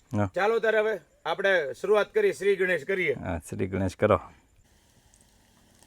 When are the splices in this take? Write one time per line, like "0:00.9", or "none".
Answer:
0:04.6

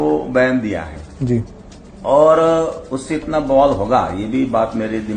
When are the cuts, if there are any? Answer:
none

